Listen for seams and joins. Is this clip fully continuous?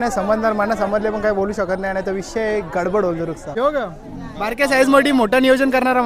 no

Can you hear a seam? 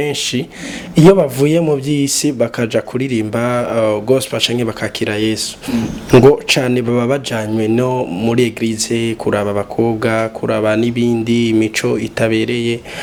no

